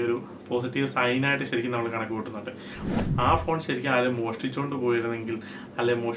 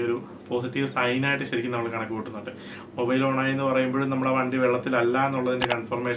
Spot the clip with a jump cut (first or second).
first